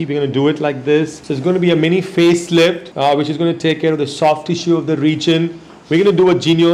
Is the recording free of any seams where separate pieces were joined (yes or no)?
no